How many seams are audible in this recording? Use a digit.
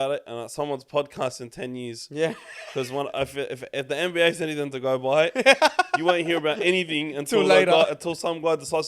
0